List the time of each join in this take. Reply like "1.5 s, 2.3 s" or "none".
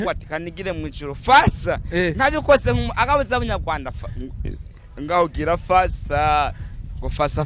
none